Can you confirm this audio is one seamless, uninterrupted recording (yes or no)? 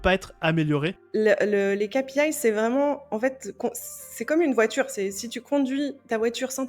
no